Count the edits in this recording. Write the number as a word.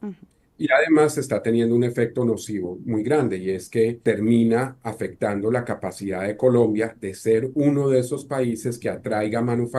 one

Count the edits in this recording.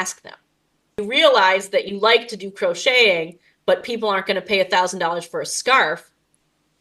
one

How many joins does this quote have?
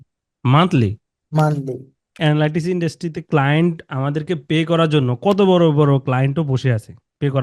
one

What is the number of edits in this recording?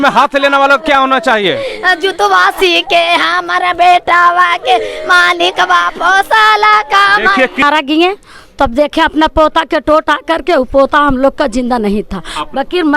one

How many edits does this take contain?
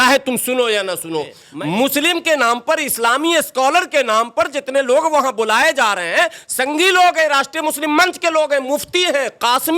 one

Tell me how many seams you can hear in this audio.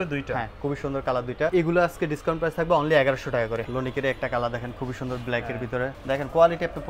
three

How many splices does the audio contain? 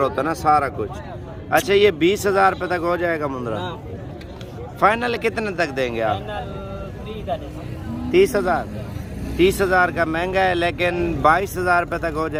zero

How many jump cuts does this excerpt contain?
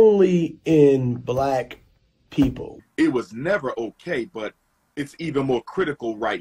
one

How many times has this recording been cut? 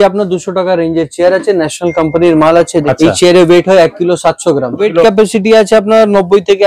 two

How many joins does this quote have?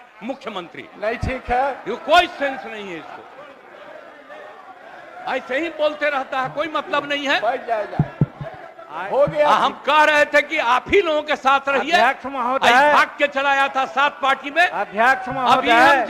zero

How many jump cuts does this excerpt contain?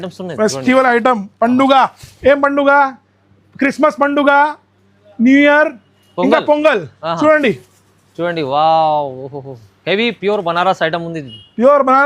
zero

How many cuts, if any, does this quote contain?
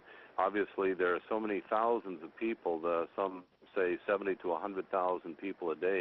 zero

